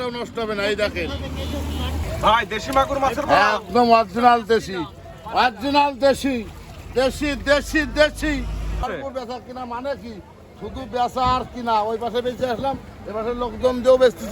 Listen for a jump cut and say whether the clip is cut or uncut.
cut